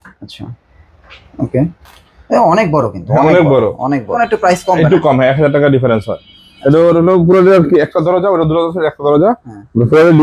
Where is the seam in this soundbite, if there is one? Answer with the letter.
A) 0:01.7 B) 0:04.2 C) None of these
B